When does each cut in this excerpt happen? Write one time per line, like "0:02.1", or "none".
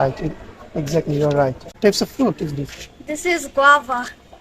0:01.8

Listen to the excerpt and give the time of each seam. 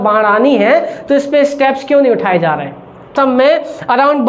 0:03.1

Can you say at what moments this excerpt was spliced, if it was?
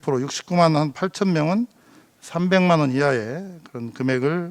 none

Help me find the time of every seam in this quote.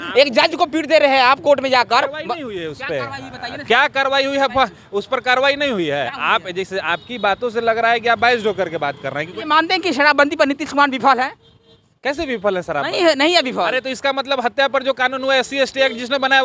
0:09.3

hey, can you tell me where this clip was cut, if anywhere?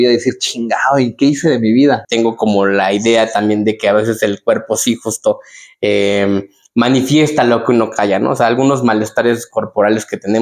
0:02.1

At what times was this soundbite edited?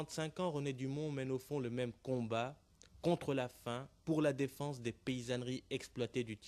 none

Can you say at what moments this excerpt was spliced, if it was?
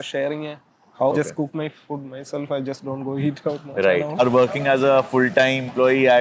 0:01.1
0:04.2

